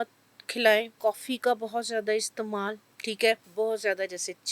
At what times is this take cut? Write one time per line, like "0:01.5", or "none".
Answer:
0:00.9
0:03.5